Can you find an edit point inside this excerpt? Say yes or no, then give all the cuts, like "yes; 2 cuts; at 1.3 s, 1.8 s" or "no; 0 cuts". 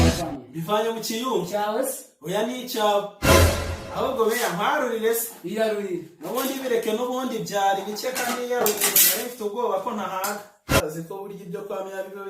yes; 1 cut; at 10.8 s